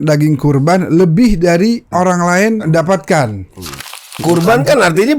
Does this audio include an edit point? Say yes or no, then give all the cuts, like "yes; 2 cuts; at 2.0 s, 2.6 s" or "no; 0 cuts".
yes; 3 cuts; at 1.9 s, 2.7 s, 4.1 s